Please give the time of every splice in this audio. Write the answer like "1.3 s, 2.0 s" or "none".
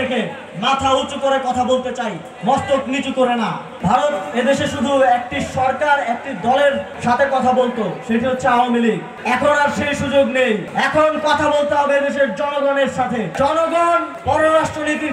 3.7 s, 6.9 s, 9.1 s, 10.7 s, 13.3 s, 14.1 s